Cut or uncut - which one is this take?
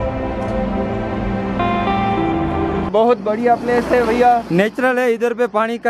cut